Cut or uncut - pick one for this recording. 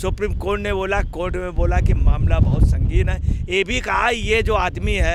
uncut